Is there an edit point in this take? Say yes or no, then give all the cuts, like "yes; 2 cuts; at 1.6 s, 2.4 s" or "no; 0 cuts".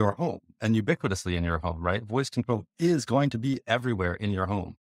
no; 0 cuts